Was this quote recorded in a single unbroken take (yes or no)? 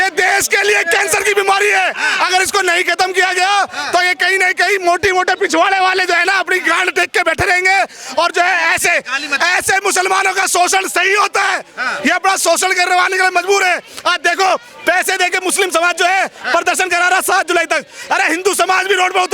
yes